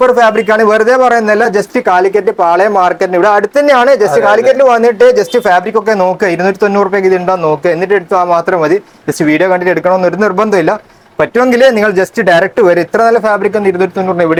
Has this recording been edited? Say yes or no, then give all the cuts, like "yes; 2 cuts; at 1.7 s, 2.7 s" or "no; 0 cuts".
no; 0 cuts